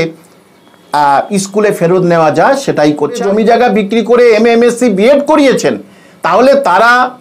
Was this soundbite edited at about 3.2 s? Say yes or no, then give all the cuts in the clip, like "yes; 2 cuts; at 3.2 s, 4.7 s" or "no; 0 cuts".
yes; 1 cut; at 3.2 s